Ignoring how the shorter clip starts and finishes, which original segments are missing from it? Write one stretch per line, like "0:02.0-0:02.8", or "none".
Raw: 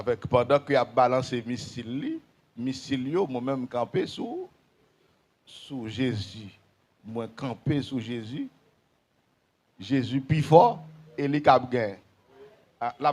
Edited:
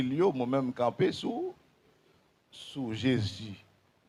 none